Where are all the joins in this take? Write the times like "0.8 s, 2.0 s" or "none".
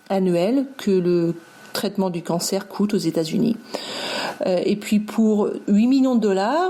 none